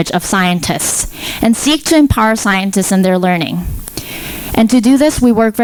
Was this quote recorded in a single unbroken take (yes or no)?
yes